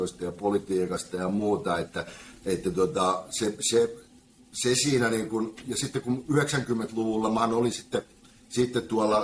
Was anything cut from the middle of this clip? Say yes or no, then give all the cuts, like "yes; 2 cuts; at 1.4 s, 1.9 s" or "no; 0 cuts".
no; 0 cuts